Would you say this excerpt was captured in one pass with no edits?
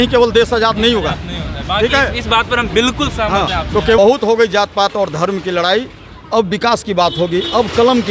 no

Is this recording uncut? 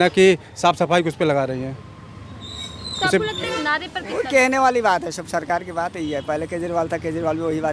no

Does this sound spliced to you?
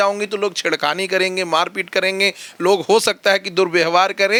no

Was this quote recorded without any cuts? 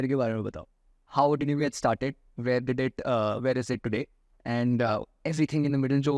yes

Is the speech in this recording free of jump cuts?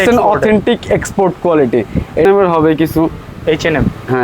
no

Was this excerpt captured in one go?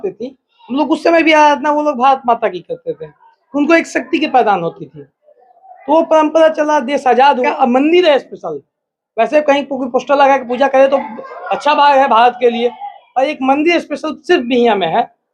no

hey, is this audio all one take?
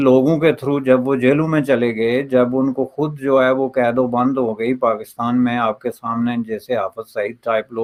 yes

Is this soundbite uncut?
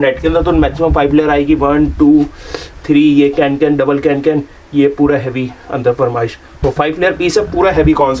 yes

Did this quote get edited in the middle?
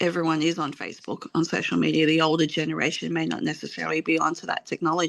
no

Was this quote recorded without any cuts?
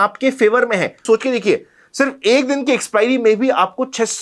no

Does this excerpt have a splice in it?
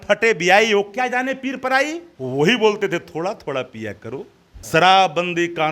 yes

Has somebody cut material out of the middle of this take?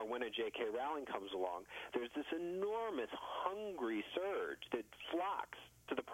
no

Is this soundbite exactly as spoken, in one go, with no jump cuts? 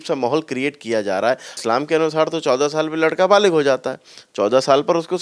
no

